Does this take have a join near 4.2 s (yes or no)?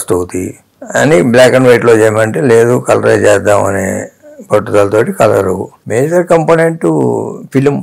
no